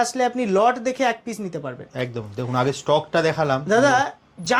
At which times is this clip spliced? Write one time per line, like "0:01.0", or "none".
none